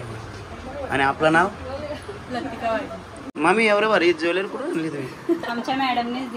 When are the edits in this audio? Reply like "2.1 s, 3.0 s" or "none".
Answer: 3.3 s